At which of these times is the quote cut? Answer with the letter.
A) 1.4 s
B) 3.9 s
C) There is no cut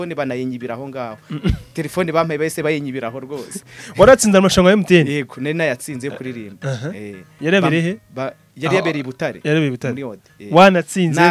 C